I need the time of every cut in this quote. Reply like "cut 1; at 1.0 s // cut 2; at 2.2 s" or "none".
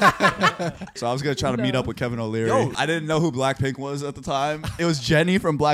cut 1; at 0.9 s // cut 2; at 2.8 s // cut 3; at 4.8 s